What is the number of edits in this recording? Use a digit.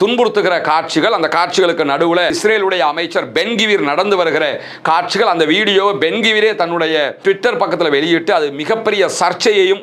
0